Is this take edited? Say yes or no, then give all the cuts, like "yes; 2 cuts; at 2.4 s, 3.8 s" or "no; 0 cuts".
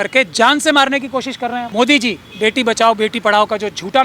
yes; 1 cut; at 1.6 s